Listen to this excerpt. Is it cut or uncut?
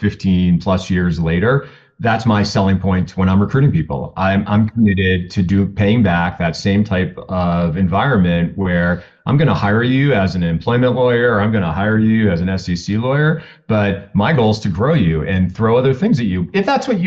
uncut